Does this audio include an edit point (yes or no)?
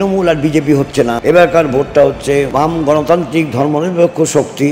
yes